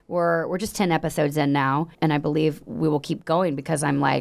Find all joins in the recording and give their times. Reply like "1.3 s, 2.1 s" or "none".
1.9 s